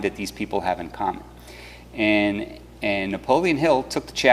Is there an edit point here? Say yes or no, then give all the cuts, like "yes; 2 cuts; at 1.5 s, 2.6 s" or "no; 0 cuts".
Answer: yes; 1 cut; at 3.4 s